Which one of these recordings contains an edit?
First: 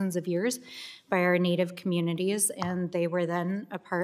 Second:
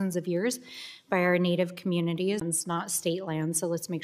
first; 1 cut; at 2.4 s

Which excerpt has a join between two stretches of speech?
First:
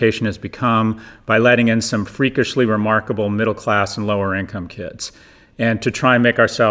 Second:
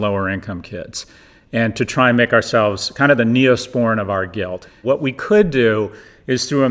second; 1 cut; at 4.7 s

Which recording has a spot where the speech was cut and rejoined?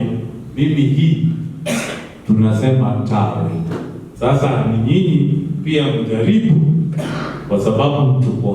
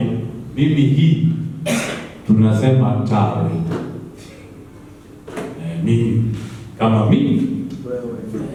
first; 1 cut; at 4.0 s

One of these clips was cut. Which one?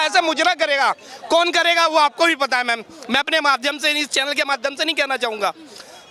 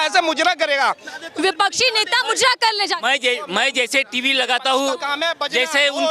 second; 1 cut; at 1.1 s

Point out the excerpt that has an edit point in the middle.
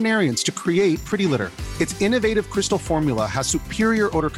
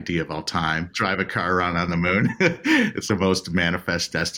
second; 2 cuts; at 0.9 s, 3.0 s

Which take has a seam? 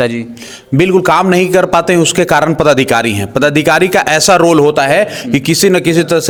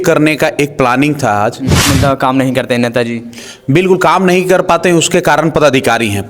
second; 1 cut; at 1.9 s

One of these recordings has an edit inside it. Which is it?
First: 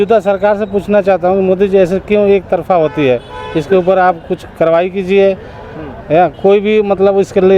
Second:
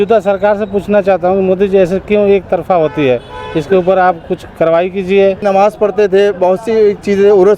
second; 1 cut; at 5.4 s

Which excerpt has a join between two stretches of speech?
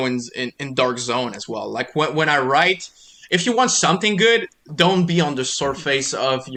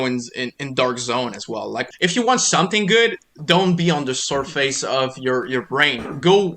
second; 1 cut; at 1.8 s

